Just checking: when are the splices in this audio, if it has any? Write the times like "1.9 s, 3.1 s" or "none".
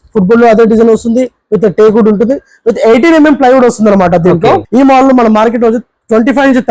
4.6 s